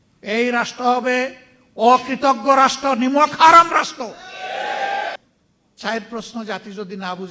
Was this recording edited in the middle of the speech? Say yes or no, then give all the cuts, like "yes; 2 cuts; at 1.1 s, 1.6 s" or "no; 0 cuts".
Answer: yes; 1 cut; at 5.2 s